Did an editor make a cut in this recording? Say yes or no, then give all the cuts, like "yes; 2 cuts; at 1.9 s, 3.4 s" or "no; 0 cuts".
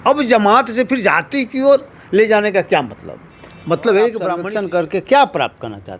yes; 1 cut; at 4.4 s